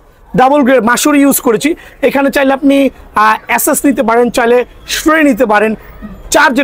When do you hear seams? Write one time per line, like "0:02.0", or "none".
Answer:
none